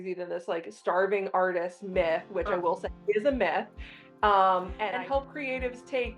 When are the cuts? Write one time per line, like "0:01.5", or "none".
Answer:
0:04.8